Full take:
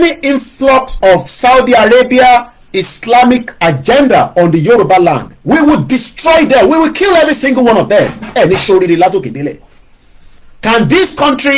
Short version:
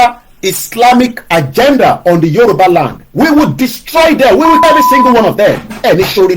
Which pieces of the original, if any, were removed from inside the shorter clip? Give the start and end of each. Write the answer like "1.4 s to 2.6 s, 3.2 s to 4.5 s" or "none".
6.9 s to 7.1 s